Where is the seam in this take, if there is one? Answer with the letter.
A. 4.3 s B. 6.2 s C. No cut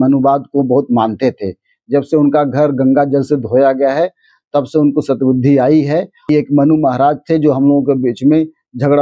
B